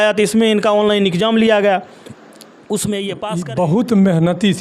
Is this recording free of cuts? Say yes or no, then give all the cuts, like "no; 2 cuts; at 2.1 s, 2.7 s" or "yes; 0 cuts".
no; 1 cut; at 3.3 s